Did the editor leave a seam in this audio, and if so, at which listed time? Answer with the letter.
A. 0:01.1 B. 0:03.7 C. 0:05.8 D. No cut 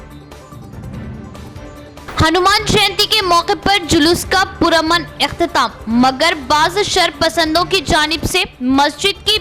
A